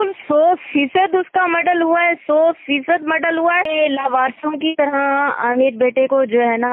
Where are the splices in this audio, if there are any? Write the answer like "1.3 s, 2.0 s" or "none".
3.7 s